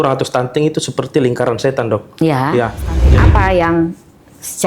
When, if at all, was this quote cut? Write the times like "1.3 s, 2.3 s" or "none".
3.1 s